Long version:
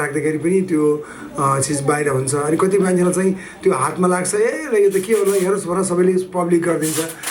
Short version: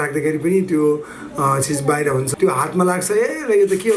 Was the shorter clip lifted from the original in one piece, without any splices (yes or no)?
no